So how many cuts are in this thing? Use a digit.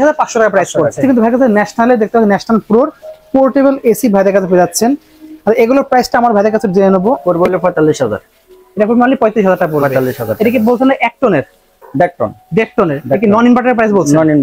2